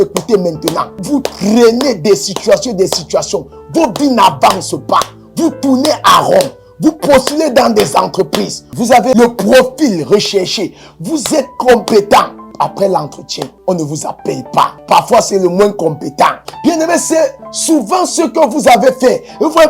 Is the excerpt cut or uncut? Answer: cut